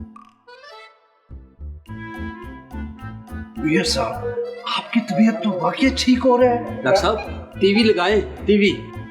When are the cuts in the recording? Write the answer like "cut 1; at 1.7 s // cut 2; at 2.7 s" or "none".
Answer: none